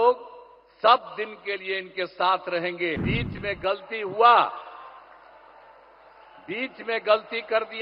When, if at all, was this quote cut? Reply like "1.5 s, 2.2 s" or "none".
3.0 s